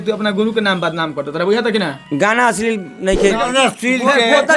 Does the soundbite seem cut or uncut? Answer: cut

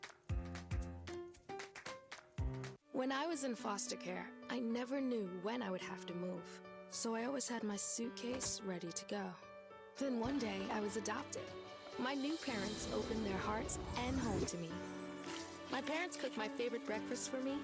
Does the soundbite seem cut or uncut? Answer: cut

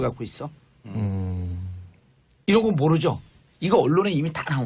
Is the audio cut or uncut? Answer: cut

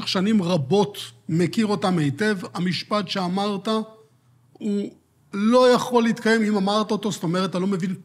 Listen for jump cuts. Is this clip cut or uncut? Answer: uncut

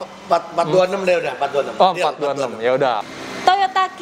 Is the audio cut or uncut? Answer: cut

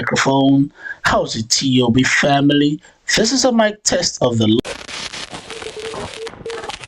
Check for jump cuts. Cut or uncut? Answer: cut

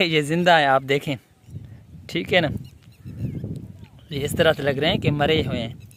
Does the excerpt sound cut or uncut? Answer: uncut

